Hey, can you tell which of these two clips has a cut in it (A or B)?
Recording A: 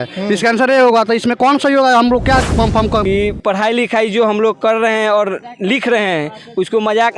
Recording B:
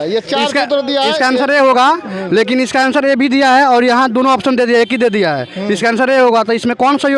A